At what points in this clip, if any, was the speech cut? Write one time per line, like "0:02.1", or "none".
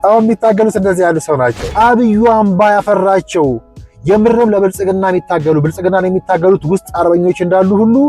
0:01.6